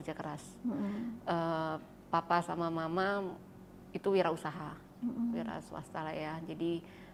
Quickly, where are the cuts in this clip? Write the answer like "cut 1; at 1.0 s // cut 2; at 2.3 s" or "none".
none